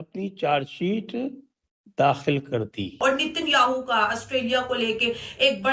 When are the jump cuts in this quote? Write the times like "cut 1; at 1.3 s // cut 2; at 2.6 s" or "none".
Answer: cut 1; at 3.0 s